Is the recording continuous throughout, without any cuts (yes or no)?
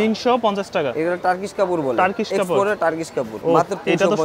no